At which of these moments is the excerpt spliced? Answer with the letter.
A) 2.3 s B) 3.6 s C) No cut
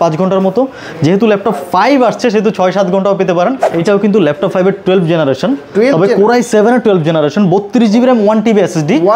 B